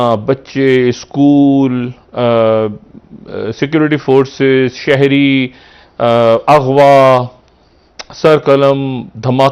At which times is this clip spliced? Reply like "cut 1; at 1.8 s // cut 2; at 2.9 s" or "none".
none

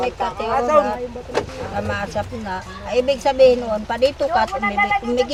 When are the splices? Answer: none

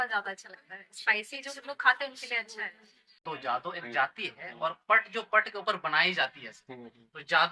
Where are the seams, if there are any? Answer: cut 1; at 3.2 s

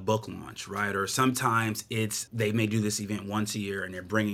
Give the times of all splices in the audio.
cut 1; at 2.2 s

